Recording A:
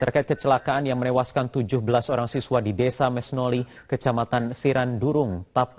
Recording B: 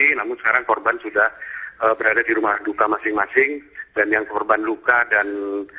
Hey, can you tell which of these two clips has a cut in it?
B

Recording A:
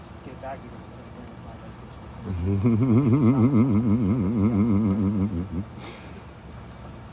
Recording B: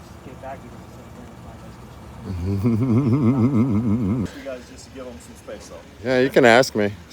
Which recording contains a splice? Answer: B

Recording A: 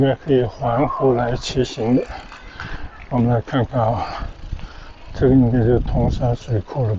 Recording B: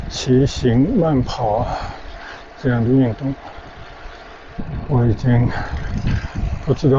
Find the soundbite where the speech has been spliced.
B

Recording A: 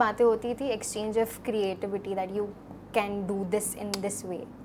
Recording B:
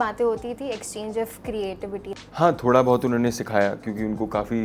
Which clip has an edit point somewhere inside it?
B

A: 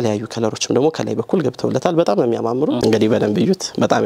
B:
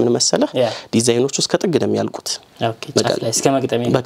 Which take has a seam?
A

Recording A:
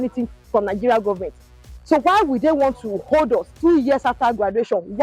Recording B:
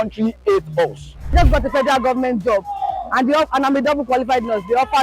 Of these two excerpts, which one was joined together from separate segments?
B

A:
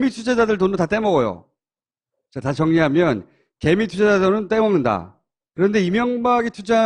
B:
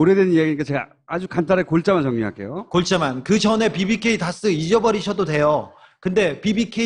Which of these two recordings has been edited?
A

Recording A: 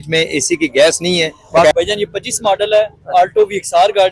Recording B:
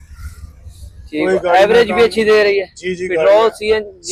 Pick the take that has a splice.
A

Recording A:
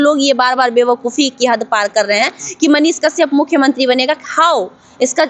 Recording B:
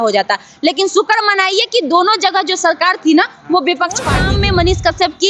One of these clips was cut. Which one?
B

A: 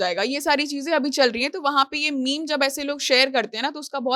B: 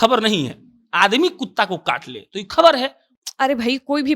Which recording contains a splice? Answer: B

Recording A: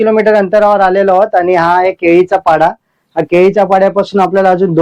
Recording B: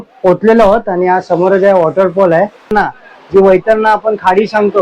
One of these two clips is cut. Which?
B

